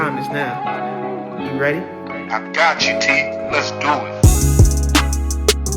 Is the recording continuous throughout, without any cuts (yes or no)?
yes